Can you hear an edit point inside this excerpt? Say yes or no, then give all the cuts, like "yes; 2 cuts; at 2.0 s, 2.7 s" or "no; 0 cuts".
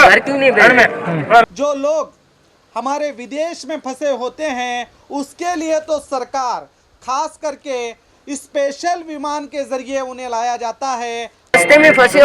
yes; 2 cuts; at 1.4 s, 11.5 s